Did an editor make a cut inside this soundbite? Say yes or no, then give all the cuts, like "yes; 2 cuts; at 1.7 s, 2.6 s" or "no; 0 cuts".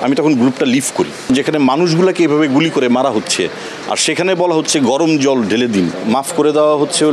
yes; 2 cuts; at 1.3 s, 6.0 s